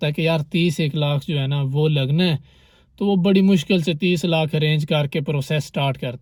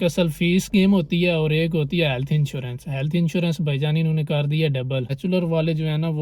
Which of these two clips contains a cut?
second; 1 cut; at 5.1 s

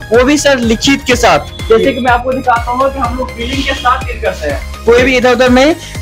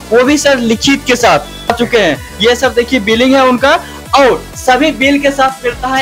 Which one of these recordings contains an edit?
second; 1 cut; at 1.7 s

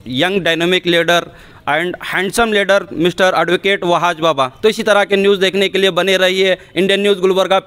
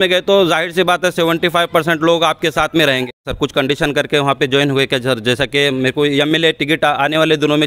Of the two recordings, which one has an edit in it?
second; 1 cut; at 3.2 s

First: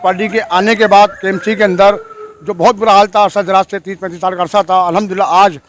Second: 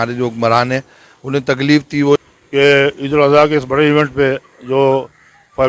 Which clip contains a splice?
second; 1 cut; at 2.2 s

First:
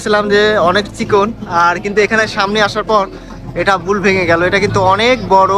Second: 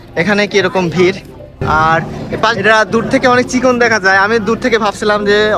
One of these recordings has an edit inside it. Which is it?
second; 1 cut; at 1.6 s

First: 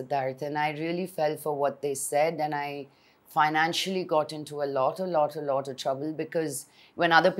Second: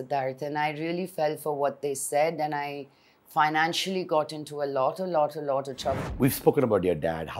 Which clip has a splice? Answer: second; 1 cut; at 6.0 s

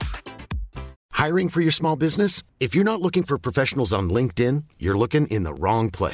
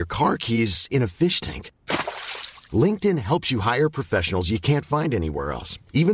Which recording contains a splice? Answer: first; 1 cut; at 1.0 s

